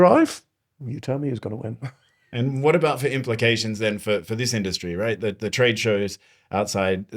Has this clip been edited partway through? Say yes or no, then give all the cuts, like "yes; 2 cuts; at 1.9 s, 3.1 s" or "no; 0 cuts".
no; 0 cuts